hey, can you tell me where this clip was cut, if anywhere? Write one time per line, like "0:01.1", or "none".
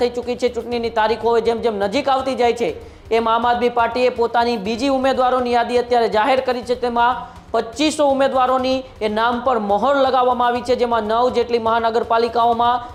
none